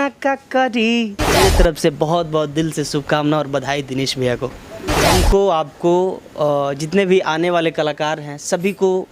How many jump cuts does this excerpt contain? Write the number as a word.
two